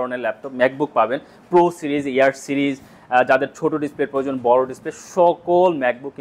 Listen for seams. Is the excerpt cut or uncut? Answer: uncut